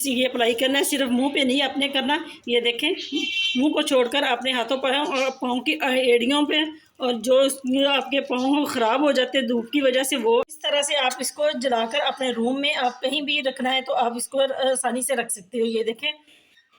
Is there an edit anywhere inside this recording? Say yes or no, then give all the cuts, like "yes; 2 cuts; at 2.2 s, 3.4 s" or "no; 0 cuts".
yes; 1 cut; at 10.5 s